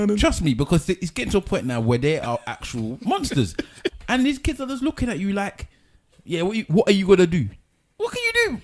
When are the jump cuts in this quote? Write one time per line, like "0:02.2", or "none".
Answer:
0:03.9